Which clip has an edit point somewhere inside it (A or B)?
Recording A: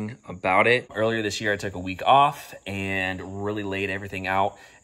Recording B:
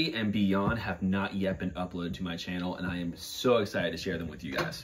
A